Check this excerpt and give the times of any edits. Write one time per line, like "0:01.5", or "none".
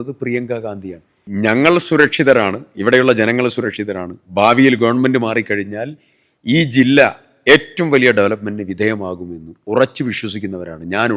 0:01.2